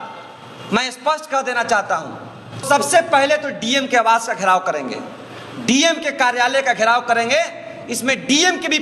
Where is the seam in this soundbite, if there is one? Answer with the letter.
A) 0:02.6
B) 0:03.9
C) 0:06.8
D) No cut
A